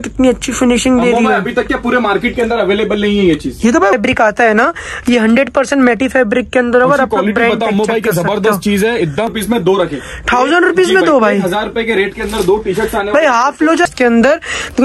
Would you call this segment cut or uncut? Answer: cut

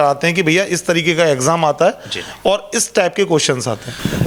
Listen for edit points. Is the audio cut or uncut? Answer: uncut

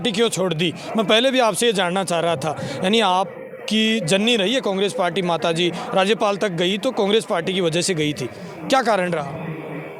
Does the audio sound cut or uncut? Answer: uncut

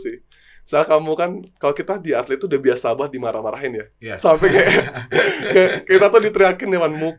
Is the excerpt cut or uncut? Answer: uncut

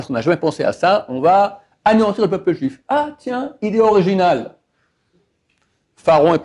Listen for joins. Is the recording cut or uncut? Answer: uncut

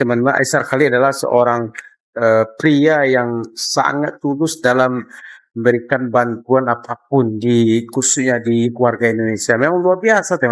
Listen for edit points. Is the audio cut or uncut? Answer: uncut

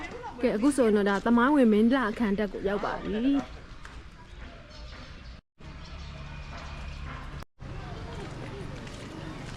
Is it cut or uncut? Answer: uncut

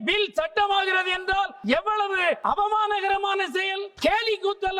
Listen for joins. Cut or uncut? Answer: cut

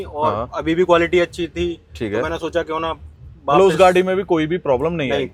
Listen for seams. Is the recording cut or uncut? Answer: uncut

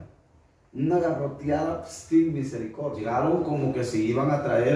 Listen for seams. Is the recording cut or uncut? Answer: cut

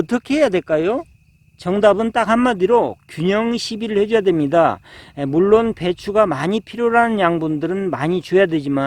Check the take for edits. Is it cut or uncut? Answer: uncut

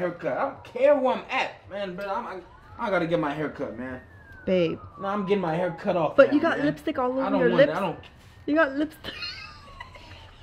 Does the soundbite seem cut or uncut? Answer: uncut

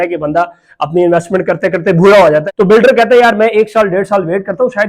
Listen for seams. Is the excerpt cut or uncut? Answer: cut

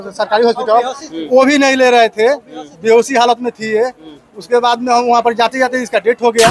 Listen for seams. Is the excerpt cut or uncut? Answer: uncut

